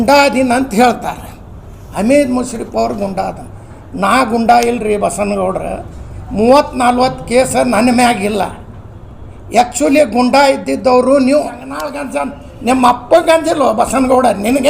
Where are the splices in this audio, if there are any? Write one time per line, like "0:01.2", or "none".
0:12.0